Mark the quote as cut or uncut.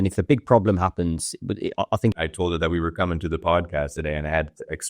cut